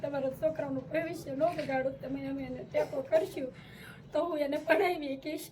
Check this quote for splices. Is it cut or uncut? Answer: uncut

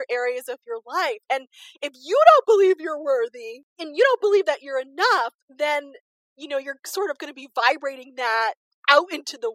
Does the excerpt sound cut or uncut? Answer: uncut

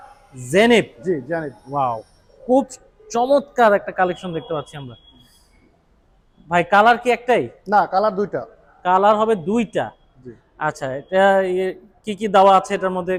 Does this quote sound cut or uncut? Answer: uncut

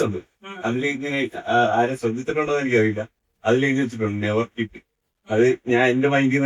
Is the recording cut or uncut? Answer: uncut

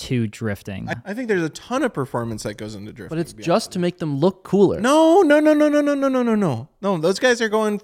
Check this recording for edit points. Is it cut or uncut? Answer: cut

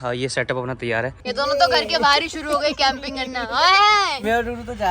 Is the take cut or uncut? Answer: cut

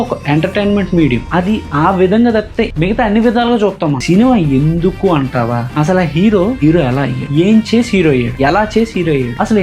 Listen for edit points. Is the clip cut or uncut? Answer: cut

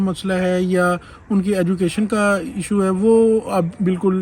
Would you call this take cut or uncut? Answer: uncut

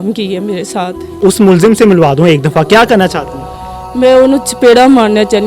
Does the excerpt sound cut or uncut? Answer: cut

